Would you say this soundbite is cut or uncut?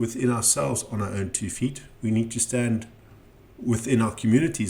uncut